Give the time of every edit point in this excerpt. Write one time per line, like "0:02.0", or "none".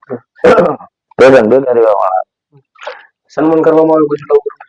none